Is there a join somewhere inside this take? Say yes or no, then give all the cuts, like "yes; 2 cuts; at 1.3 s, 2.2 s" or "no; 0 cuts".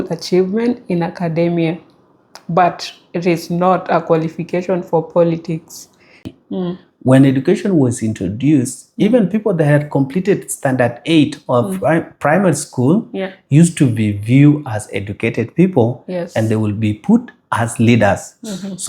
yes; 1 cut; at 6.3 s